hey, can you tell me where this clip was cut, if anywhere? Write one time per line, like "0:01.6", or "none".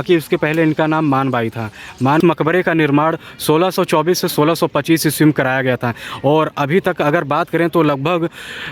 0:02.2